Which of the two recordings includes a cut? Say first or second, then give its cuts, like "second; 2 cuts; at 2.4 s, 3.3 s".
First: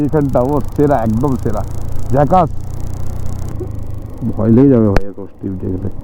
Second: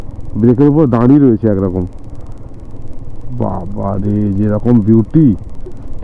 first; 1 cut; at 3.5 s